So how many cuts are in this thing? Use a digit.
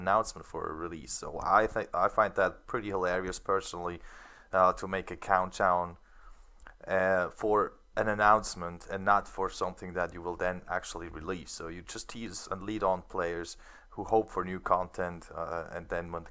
0